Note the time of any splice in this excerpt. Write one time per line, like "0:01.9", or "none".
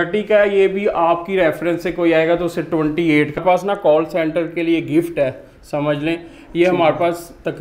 0:03.4